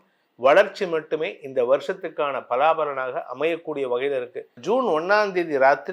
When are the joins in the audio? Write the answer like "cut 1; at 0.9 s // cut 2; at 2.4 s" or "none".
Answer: cut 1; at 4.6 s